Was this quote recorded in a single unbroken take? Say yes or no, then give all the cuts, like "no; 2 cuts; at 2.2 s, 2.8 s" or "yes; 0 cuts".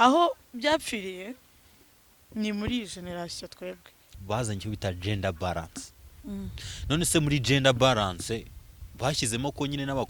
no; 1 cut; at 4.1 s